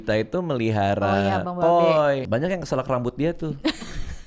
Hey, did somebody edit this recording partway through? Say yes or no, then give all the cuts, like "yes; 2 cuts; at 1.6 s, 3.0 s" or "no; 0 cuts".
yes; 1 cut; at 2.2 s